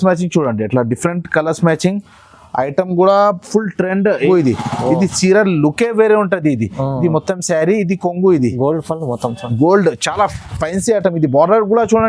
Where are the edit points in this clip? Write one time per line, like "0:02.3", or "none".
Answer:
0:04.2